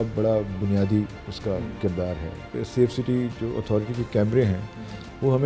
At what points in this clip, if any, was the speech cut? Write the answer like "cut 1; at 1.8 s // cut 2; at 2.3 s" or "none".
cut 1; at 2.5 s